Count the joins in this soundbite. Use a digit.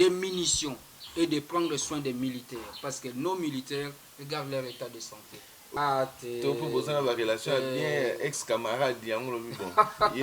1